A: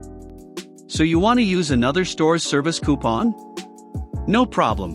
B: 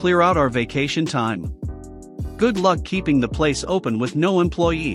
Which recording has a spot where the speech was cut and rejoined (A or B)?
A